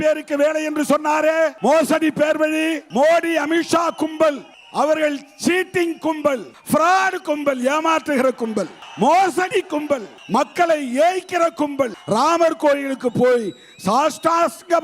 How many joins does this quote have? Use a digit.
7